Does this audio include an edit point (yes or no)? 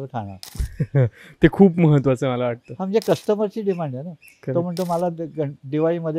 no